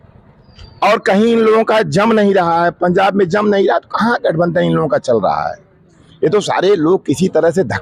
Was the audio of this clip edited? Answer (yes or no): no